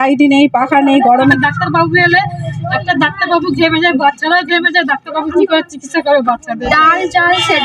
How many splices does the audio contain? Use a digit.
2